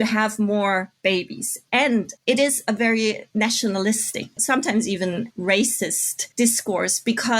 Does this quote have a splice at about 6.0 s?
no; 3 cuts; at 2.1 s, 3.2 s, 4.4 s

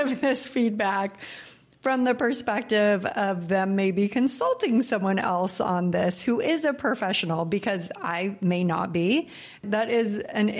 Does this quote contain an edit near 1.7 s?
no; 1 cut; at 9.6 s

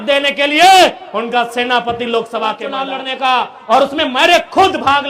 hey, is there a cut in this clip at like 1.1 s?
no; 1 cut; at 2.7 s

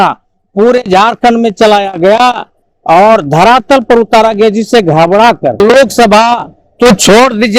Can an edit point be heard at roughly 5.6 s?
yes; 1 cut; at 5.6 s

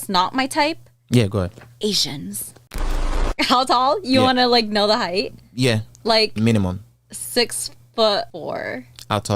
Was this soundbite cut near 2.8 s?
yes; 1 cut; at 2.8 s

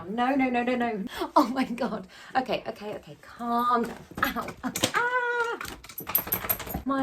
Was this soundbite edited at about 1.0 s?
yes; 1 cut; at 1.0 s

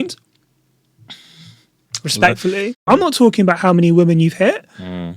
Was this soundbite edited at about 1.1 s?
no; 1 cut; at 2.8 s

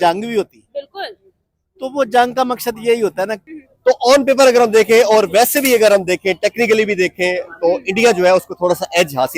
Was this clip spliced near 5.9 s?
no; 1 cut; at 3.4 s

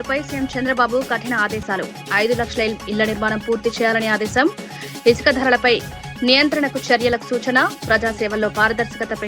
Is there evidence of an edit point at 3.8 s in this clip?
no; 0 cuts

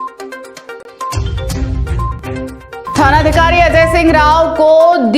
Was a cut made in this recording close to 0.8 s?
yes; 2 cuts; at 0.8 s, 2.2 s

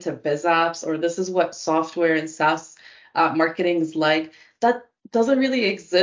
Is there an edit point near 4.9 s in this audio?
no; 0 cuts

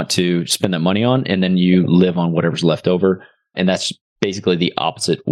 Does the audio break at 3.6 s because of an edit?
no; 0 cuts

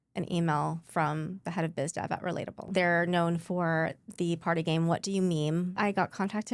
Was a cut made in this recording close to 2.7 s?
yes; 2 cuts; at 2.7 s, 5.7 s

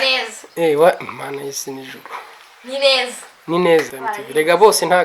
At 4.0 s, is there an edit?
yes; 1 cut; at 4.0 s

